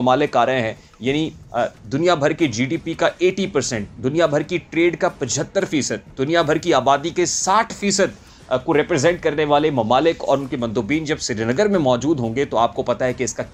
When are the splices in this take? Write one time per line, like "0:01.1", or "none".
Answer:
none